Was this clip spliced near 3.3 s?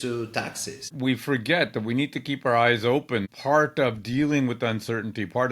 yes; 2 cuts; at 0.9 s, 3.3 s

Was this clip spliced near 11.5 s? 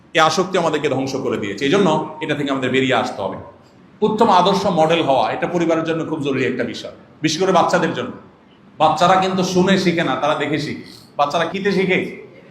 yes; 1 cut; at 11.5 s

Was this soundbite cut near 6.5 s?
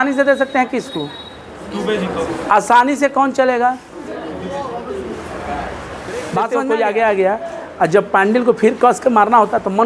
yes; 1 cut; at 6.5 s

